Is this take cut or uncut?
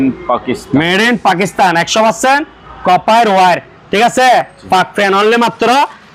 uncut